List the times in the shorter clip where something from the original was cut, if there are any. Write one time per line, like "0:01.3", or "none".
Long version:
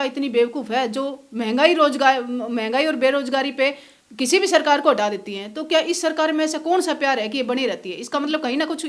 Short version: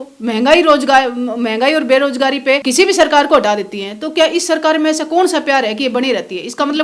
0:02.6